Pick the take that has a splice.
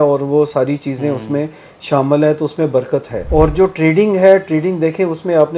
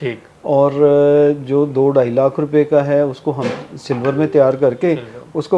first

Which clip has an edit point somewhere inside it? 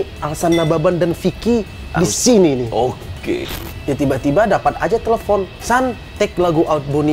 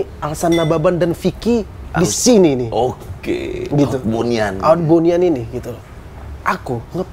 first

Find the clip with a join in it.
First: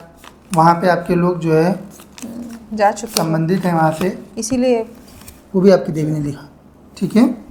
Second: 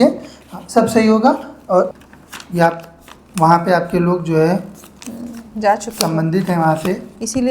second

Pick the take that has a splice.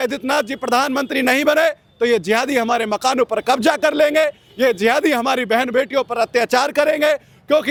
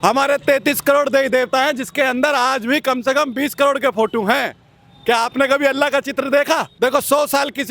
second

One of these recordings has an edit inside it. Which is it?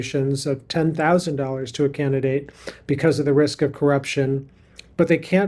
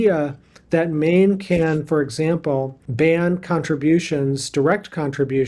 second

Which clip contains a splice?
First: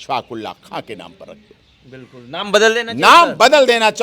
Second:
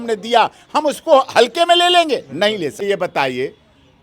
second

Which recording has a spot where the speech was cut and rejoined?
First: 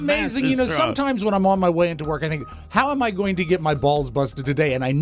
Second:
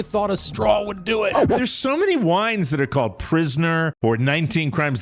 second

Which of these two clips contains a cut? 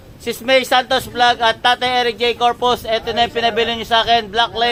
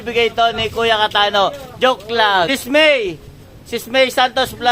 second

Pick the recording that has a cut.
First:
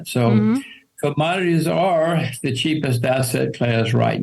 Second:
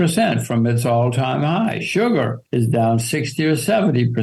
second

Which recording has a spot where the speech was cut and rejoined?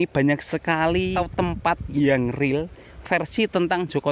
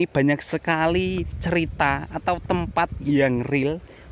first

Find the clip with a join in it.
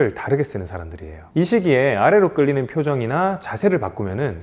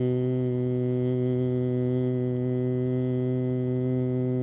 first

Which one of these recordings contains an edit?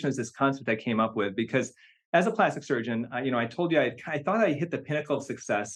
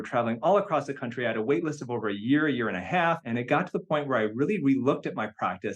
second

